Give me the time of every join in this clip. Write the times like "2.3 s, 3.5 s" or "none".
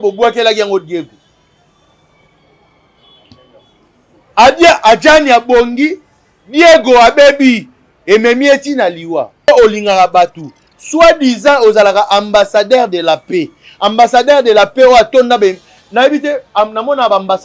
9.5 s